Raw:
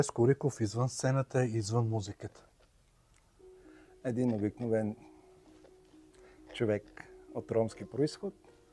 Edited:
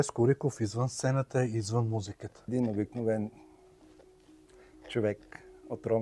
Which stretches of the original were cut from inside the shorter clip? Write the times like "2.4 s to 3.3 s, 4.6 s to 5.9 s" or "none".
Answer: 2.5 s to 4.1 s